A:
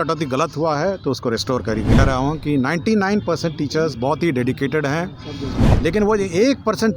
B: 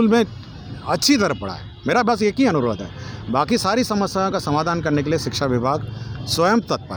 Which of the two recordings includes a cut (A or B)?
A